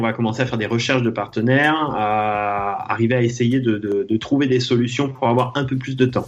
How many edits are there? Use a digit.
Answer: 0